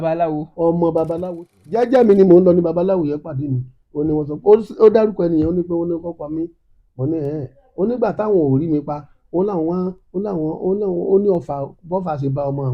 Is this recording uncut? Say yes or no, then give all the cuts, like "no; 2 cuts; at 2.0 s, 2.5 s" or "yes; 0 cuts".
no; 1 cut; at 1.2 s